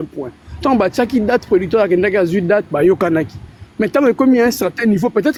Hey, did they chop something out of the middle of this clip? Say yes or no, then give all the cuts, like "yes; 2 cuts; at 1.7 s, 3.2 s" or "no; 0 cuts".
no; 0 cuts